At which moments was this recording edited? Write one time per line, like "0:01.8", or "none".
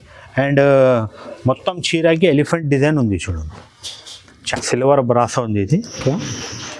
0:04.5

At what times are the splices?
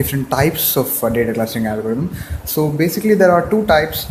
0:01.0

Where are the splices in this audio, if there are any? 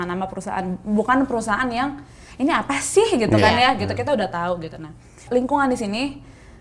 0:05.2

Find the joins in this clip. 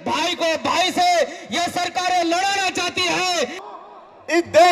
0:03.6

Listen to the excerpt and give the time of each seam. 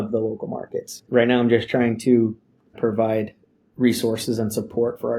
0:01.0
0:02.7

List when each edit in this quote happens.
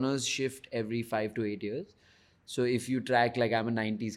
none

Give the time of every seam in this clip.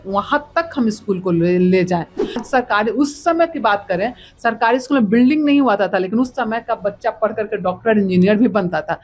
0:02.4

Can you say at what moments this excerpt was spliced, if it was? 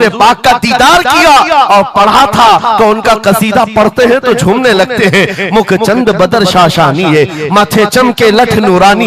none

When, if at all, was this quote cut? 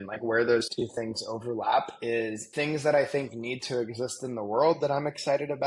0:02.4

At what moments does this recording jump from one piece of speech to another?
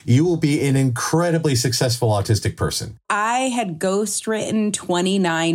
0:03.0

